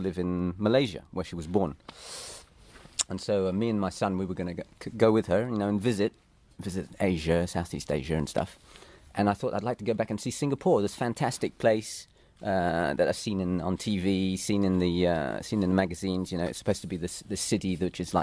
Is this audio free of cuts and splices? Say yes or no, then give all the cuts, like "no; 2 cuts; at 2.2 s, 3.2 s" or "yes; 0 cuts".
yes; 0 cuts